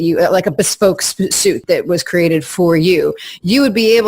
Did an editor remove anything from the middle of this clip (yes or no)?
yes